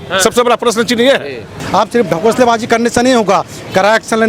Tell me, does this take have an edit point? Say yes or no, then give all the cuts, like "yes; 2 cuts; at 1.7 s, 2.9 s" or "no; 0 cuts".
yes; 1 cut; at 1.6 s